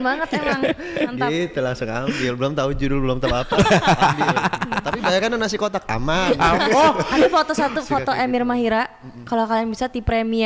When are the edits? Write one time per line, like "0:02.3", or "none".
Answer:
0:07.1